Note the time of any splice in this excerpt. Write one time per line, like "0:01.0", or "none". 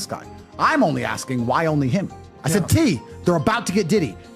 none

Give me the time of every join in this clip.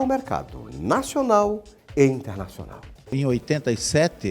0:03.1

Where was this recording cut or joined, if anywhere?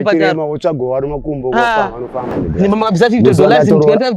0:02.4

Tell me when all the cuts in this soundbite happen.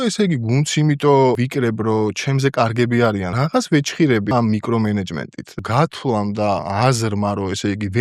0:01.4
0:03.3
0:04.3
0:05.6
0:06.6

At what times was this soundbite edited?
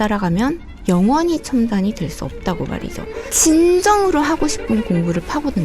0:03.3

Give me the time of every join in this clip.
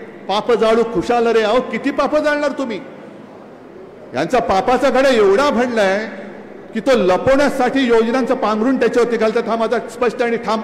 none

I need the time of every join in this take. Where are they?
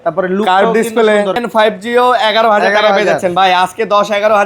0:01.4

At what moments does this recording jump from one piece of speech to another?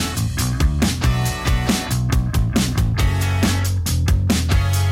0:02.2

